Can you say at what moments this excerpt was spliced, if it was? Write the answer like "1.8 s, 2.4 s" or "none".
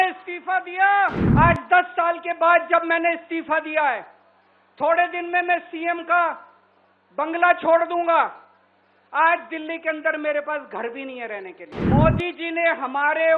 1.2 s, 11.7 s

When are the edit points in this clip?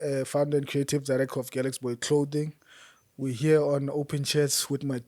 none

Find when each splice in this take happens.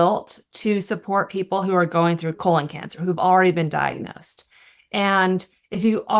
2.4 s

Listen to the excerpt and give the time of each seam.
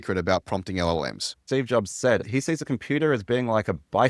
1.3 s, 2.3 s

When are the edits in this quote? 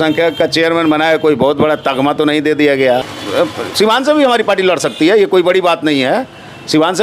3.1 s

